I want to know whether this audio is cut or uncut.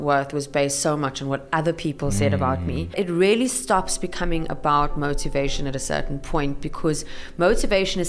cut